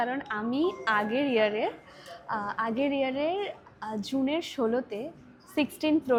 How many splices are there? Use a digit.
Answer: 0